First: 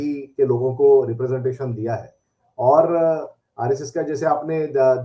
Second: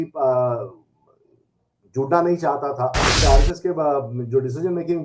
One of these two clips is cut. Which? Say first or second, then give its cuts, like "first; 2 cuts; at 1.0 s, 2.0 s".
second; 1 cut; at 3.2 s